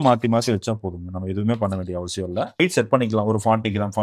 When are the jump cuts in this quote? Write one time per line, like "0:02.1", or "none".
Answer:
0:02.6

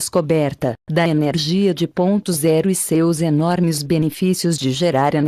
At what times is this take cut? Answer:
none

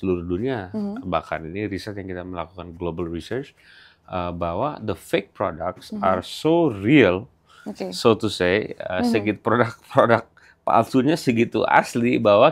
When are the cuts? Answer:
none

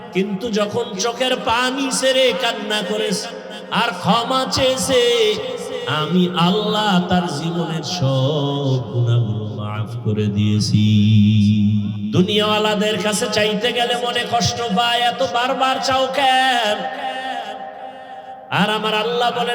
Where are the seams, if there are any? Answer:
0:12.0

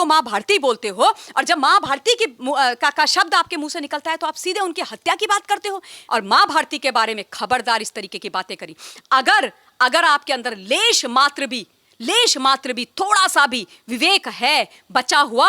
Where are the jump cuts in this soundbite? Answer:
0:05.9

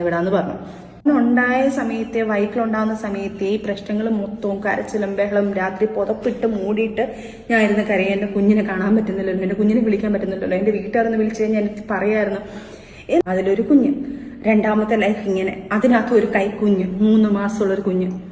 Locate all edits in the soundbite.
0:01.1
0:13.2

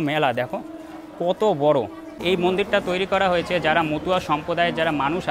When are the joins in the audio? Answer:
0:02.1

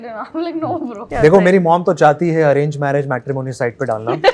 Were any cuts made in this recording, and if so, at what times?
0:01.1

